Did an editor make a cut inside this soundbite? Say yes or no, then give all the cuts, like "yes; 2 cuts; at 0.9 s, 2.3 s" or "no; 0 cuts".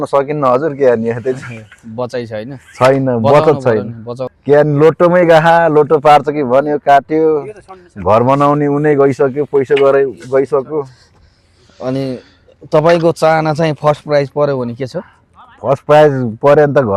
no; 0 cuts